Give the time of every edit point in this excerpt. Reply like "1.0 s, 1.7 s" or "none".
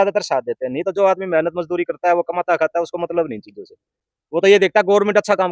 none